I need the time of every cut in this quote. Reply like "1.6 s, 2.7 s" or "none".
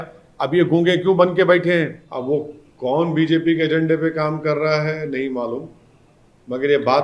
2.0 s